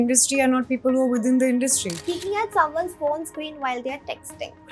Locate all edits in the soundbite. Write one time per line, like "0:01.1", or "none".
0:01.9